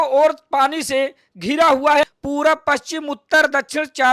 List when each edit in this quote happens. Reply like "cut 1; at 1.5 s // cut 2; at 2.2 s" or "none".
cut 1; at 2.0 s